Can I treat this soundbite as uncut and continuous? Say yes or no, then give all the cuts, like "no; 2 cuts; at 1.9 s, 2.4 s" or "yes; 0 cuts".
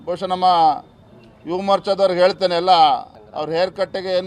no; 1 cut; at 3.2 s